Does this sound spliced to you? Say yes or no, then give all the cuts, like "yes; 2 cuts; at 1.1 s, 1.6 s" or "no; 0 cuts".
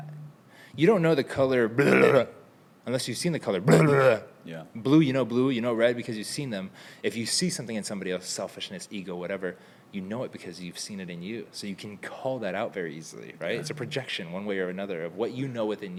no; 0 cuts